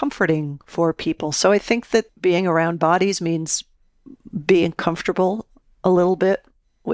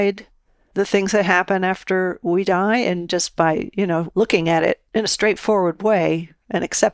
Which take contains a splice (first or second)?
second